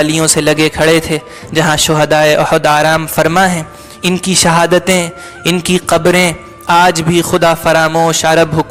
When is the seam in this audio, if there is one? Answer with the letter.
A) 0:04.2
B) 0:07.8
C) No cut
C